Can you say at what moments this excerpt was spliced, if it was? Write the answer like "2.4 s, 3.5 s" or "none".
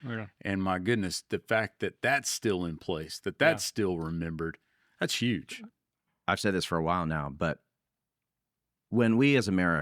5.6 s